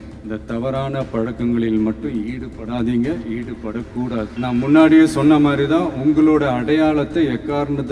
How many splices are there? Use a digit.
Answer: 1